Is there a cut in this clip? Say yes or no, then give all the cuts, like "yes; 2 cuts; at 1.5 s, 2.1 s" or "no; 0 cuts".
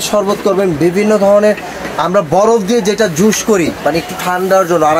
no; 0 cuts